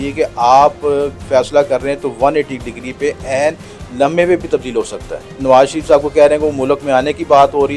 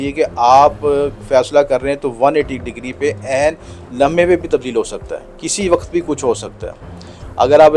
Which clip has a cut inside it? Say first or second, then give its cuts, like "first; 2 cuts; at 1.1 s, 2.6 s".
first; 1 cut; at 5.4 s